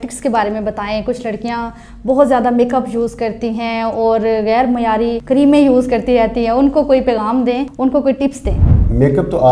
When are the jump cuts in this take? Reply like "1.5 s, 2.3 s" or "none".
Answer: none